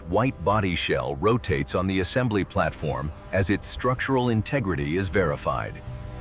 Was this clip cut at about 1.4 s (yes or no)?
no